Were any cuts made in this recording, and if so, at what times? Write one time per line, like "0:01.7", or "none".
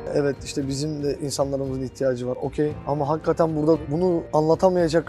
0:01.2
0:02.6
0:04.1

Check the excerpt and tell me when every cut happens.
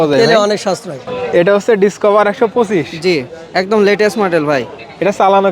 0:01.1

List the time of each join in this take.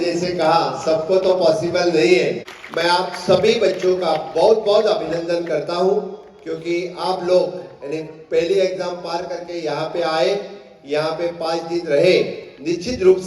0:02.5

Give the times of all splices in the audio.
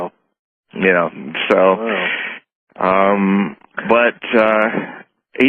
none

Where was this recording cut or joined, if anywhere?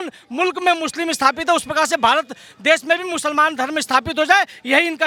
none

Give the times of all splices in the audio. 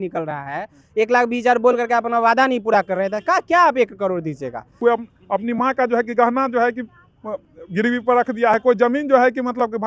0:04.6

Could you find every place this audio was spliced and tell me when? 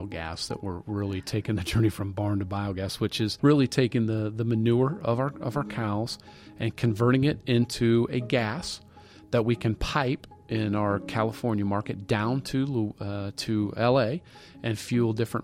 0:03.4

